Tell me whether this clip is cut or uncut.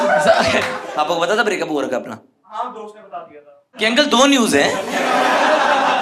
cut